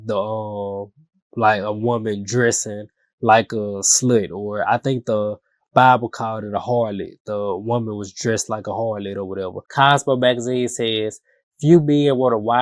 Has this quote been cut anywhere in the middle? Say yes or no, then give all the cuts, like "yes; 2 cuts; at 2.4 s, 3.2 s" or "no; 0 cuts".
yes; 1 cut; at 9.6 s